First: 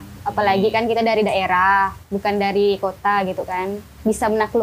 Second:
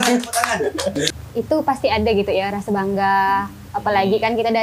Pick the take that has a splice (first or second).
second